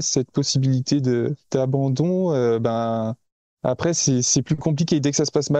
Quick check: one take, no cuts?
no; 1 cut; at 1.4 s

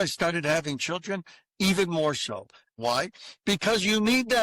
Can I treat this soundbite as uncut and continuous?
no; 1 cut; at 2.7 s

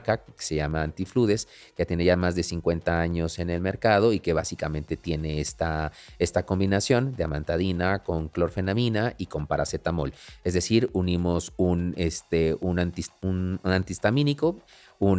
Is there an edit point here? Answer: no; 0 cuts

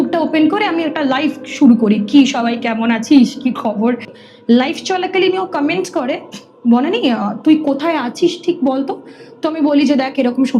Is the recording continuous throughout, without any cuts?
no; 1 cut; at 4.3 s

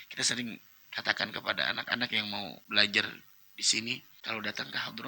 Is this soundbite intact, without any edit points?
no; 2 cuts; at 2.6 s, 4.1 s

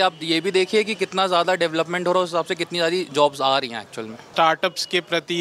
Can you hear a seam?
yes; 1 cut; at 4.3 s

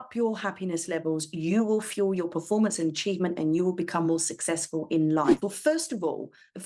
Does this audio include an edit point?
yes; 1 cut; at 5.3 s

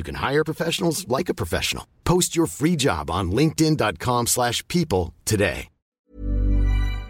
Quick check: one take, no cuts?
no; 1 cut; at 6.0 s

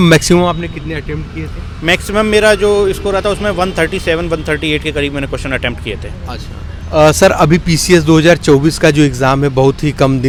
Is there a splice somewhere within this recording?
no; 0 cuts

